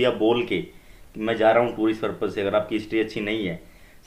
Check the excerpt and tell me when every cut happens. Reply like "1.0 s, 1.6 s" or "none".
none